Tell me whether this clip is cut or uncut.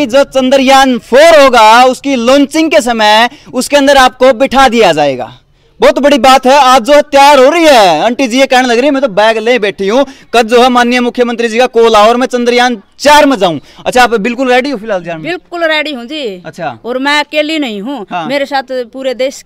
uncut